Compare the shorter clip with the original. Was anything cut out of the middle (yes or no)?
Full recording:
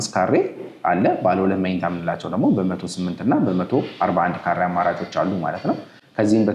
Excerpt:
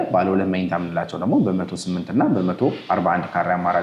no